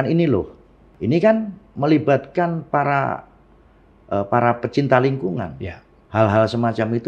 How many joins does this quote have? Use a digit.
2